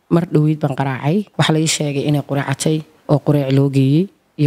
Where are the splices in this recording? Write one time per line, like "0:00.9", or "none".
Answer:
0:01.3

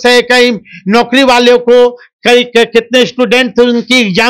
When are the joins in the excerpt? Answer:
none

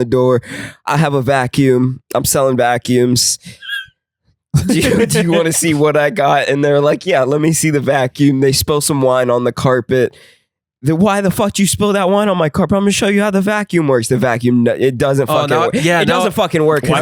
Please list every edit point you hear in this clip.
none

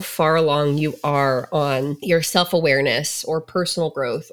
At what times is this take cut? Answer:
0:02.0

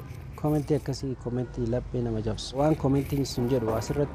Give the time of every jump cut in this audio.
0:02.5

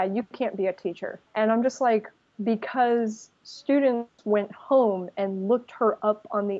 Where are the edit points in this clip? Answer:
none

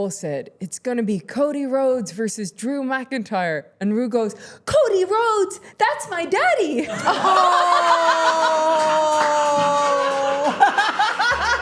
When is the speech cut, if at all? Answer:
none

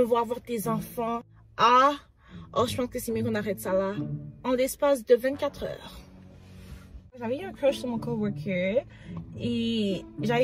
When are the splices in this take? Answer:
0:07.2

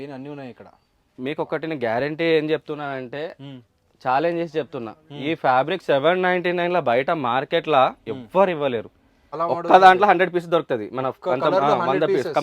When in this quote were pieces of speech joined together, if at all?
0:09.2

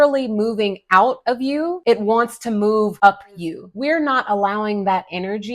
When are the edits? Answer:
0:03.7

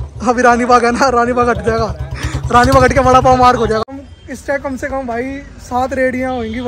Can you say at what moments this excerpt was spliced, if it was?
0:03.8

